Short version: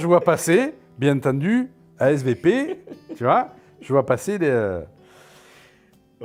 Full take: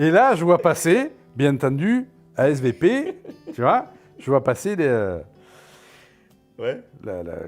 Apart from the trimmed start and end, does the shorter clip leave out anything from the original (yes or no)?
no